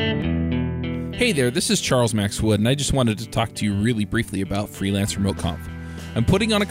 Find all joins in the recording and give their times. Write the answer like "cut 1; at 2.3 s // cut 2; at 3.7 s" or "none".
cut 1; at 1.1 s